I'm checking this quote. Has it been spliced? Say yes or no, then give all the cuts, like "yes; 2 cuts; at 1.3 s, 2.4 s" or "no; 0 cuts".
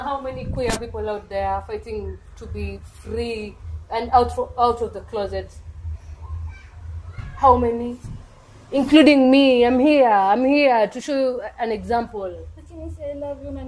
no; 0 cuts